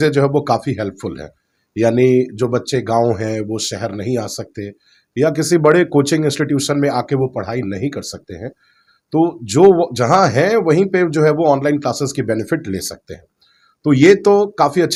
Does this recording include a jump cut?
no; 0 cuts

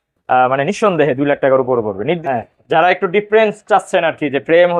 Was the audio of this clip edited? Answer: yes; 1 cut; at 2.2 s

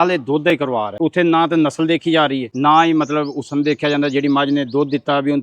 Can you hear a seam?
yes; 2 cuts; at 0.9 s, 2.5 s

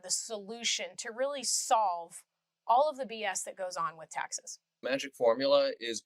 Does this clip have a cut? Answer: yes; 1 cut; at 4.8 s

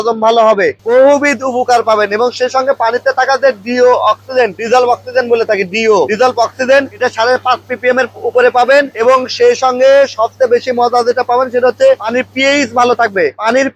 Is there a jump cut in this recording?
no; 0 cuts

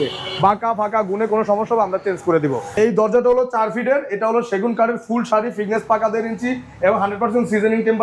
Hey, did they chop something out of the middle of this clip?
yes; 1 cut; at 2.7 s

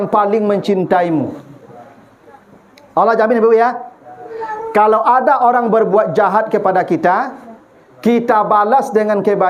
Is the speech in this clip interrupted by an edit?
no; 0 cuts

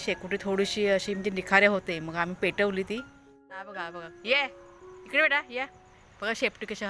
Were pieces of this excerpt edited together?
yes; 1 cut; at 3.7 s

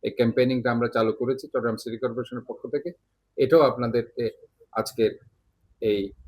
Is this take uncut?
yes; 0 cuts

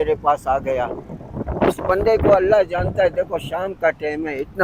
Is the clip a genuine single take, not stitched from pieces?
yes; 0 cuts

